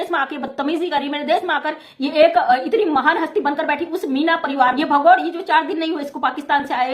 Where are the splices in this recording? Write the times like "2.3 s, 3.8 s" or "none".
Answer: 4.7 s